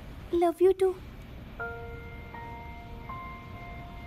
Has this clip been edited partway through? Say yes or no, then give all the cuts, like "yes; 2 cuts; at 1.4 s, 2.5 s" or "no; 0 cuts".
no; 0 cuts